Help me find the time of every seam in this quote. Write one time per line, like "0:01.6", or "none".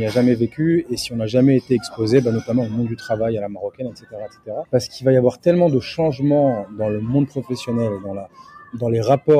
0:04.7